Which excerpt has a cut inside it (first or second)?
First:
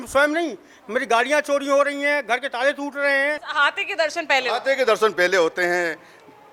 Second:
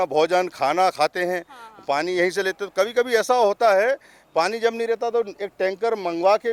first